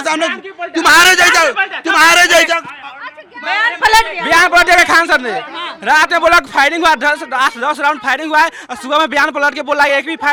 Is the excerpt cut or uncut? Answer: uncut